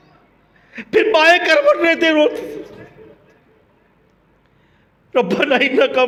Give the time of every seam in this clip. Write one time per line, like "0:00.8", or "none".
none